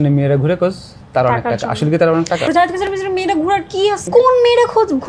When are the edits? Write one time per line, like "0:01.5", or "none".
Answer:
0:02.5
0:04.0